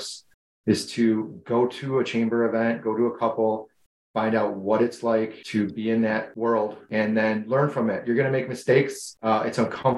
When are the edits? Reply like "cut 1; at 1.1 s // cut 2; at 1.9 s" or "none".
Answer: cut 1; at 5.4 s // cut 2; at 6.8 s // cut 3; at 9.1 s